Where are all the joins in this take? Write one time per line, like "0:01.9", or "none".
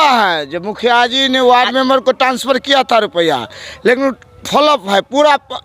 none